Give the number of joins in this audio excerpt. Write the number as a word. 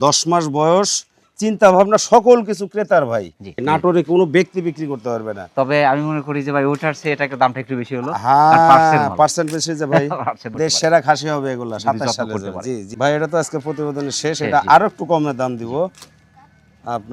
three